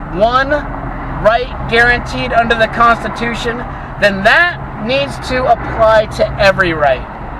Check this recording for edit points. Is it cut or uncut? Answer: uncut